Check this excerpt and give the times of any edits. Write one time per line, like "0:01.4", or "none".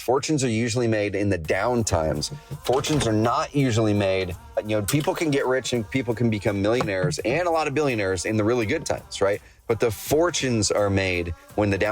0:04.6